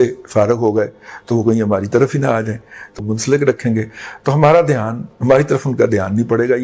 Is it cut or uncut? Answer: cut